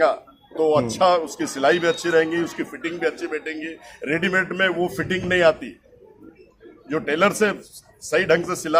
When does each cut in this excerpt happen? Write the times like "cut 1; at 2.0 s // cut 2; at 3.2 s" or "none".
none